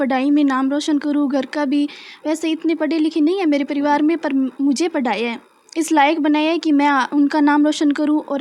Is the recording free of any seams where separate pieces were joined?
yes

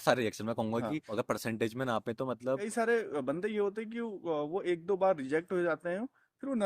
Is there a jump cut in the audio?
yes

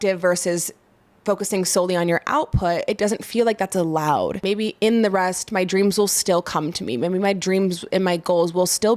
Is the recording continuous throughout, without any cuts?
no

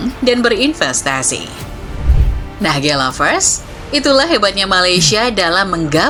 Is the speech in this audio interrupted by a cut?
no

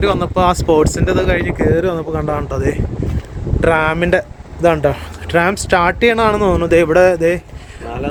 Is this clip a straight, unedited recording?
yes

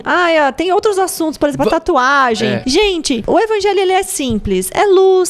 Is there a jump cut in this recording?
yes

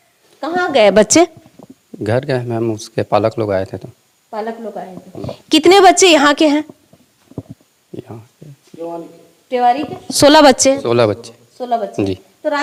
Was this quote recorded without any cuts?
yes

